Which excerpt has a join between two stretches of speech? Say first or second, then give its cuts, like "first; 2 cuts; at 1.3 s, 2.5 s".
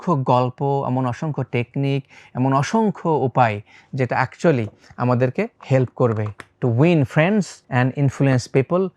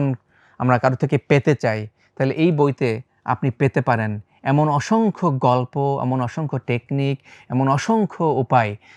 first; 2 cuts; at 5.6 s, 7.6 s